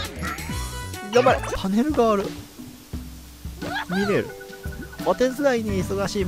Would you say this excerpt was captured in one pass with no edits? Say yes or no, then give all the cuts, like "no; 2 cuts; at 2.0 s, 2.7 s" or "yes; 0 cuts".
no; 1 cut; at 1.5 s